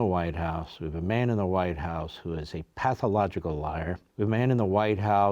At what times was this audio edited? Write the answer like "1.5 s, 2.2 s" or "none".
4.0 s